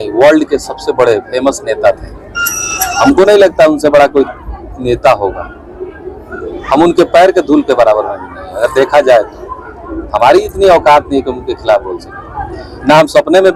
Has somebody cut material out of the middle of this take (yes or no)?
no